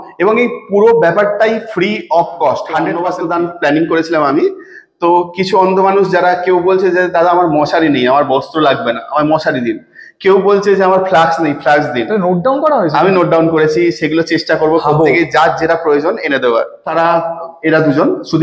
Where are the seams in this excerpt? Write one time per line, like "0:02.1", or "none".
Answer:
0:03.0
0:16.8